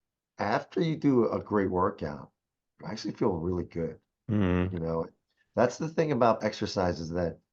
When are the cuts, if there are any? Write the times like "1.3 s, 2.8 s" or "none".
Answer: 6.4 s